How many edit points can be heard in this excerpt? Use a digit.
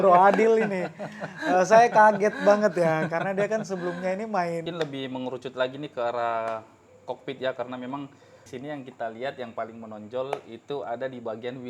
2